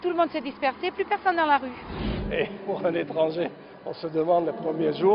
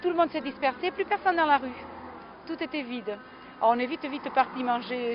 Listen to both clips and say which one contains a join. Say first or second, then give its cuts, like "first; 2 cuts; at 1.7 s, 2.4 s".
first; 1 cut; at 2.0 s